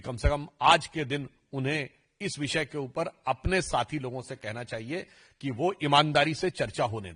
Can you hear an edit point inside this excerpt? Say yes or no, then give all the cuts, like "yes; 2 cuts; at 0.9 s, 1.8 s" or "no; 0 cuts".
no; 0 cuts